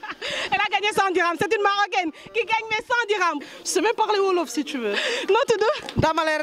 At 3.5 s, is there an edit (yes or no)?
yes